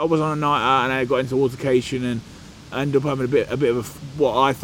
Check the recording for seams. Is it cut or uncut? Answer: uncut